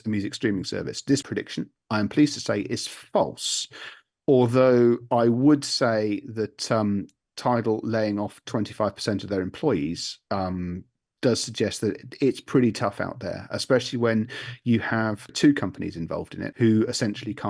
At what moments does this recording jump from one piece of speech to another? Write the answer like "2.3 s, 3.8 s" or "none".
1.3 s, 15.3 s, 16.4 s